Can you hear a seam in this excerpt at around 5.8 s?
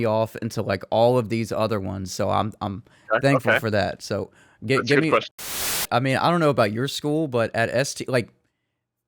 yes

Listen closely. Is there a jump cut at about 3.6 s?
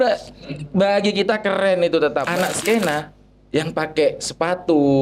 no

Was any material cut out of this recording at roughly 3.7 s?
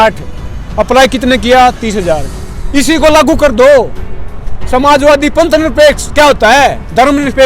no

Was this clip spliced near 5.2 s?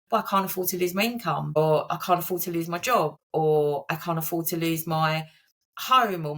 no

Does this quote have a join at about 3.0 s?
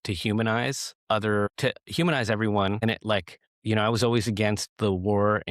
yes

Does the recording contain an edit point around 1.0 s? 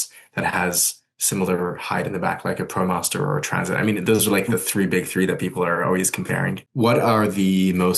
no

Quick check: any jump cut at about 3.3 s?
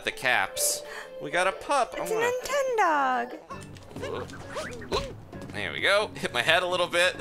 yes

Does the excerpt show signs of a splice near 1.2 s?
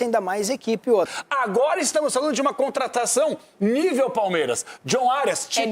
yes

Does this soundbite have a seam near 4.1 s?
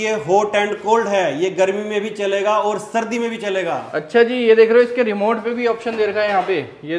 no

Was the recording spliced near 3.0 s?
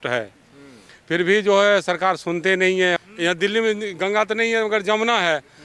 yes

